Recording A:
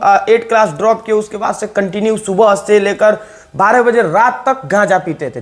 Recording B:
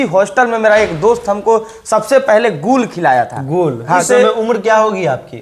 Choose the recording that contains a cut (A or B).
B